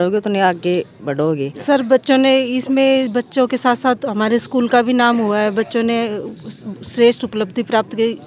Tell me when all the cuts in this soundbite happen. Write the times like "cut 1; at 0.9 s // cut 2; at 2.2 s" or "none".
cut 1; at 1.6 s